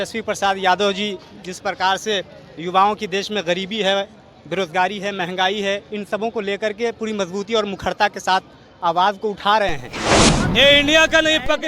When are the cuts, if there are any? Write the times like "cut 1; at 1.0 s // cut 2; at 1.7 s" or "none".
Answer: cut 1; at 10.3 s